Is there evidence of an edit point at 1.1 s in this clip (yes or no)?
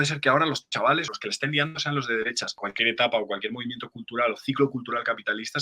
yes